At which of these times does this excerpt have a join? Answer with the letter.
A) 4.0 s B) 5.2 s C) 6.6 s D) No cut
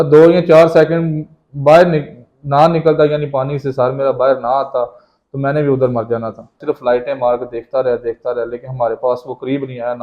C